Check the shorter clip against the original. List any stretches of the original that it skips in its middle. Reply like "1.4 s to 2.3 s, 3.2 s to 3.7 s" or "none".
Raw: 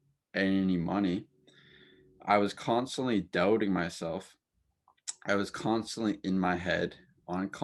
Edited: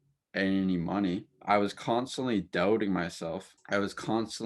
1.3 s to 2.1 s, 4.3 s to 5.1 s